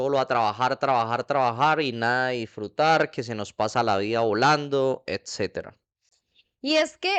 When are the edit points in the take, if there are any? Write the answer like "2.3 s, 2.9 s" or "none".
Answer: none